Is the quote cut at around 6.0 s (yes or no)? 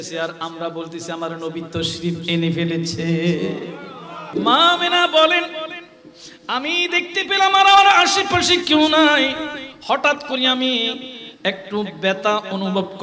no